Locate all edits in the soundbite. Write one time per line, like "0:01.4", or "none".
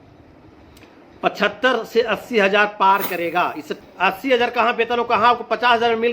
0:03.7